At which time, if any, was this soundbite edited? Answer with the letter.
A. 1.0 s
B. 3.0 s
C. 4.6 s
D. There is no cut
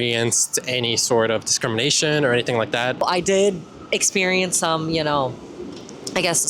B